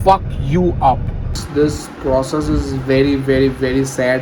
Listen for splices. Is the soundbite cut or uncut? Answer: cut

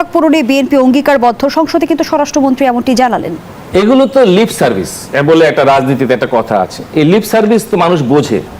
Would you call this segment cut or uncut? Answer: uncut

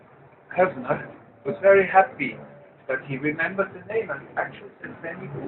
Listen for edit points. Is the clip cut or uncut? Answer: cut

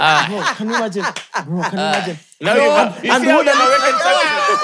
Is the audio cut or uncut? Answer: uncut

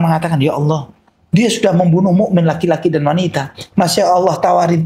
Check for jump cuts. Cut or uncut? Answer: uncut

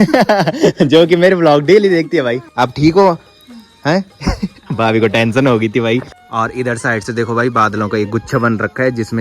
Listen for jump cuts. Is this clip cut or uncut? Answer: cut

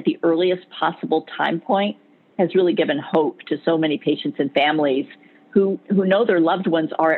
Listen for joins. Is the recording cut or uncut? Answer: uncut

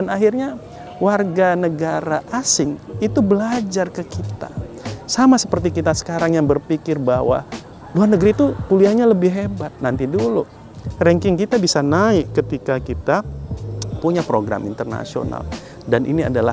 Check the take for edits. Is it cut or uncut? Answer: uncut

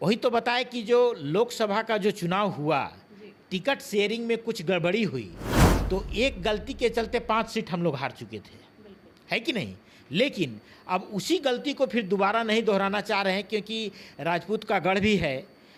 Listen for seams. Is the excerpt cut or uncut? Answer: uncut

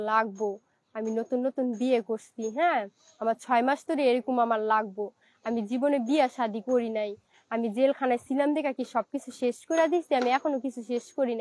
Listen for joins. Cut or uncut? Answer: uncut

